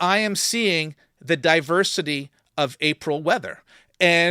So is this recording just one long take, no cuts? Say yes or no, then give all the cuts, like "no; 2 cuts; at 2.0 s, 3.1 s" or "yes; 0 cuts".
yes; 0 cuts